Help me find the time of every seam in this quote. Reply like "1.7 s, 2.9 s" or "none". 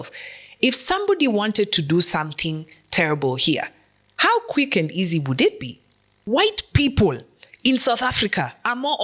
6.2 s